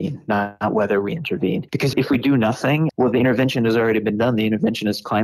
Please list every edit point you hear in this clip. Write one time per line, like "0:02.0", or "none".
0:01.7
0:02.9